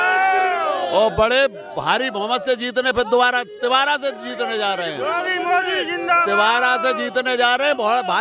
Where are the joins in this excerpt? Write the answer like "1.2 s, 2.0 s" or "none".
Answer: none